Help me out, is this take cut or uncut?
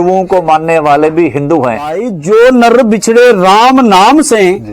cut